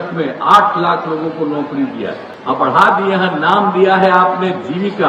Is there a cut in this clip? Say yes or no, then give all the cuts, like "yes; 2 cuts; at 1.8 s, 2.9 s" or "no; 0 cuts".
yes; 1 cut; at 2.3 s